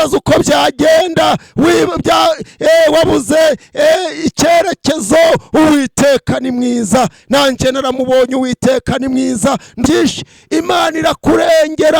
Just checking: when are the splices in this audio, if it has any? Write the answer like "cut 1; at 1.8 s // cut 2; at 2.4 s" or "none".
cut 1; at 9.9 s